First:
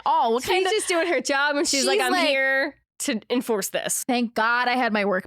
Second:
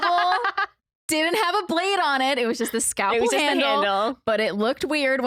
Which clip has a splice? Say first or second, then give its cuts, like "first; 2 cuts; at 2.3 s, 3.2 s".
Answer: first; 1 cut; at 4.0 s